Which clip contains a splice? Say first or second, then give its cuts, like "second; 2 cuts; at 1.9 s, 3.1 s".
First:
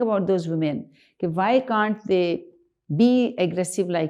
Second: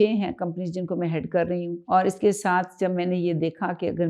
second; 1 cut; at 1.8 s